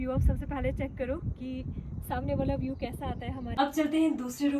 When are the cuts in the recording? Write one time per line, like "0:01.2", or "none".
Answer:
0:03.5